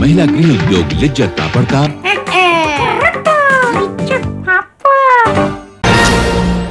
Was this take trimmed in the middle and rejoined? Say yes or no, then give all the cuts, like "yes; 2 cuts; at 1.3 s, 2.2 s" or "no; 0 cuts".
yes; 1 cut; at 5.6 s